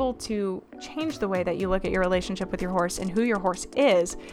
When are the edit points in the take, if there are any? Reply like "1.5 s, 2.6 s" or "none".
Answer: none